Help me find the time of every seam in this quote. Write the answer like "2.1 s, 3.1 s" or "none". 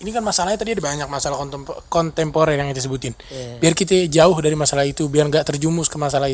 none